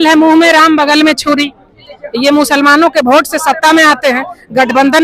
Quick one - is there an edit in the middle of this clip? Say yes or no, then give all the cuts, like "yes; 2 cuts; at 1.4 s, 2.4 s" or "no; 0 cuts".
no; 0 cuts